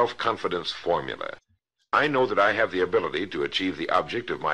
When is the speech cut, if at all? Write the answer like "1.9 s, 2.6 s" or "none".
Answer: 1.9 s

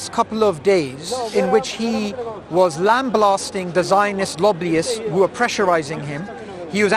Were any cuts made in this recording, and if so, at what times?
1.3 s

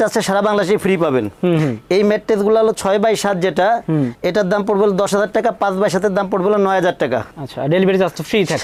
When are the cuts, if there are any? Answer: none

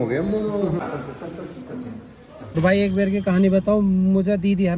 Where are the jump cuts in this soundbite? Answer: 1.0 s, 2.5 s

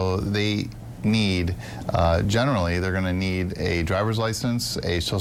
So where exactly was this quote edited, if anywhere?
none

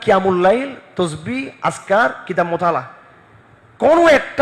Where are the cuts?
none

